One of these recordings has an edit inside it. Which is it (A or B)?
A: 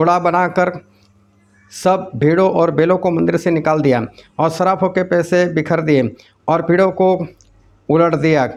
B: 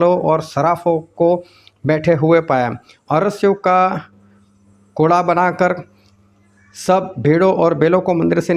B